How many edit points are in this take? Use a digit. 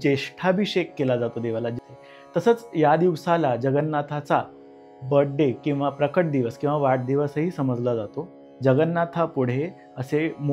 2